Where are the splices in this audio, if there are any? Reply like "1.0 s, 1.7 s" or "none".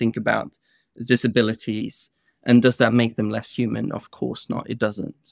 1.8 s